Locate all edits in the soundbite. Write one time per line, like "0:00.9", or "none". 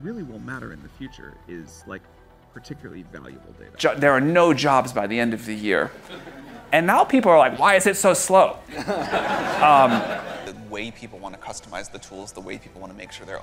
0:03.8
0:10.4